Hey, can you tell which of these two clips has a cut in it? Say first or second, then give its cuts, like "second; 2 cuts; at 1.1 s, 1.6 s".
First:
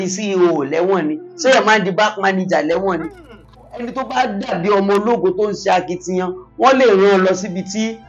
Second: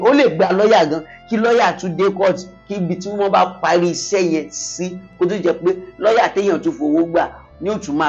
first; 1 cut; at 3.6 s